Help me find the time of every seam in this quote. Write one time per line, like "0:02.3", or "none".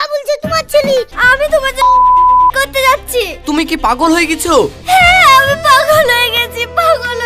0:01.2